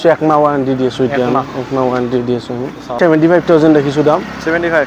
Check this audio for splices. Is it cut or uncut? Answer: cut